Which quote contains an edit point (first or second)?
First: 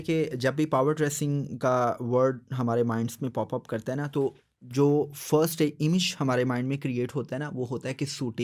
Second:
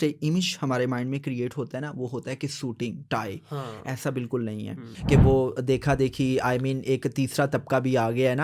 second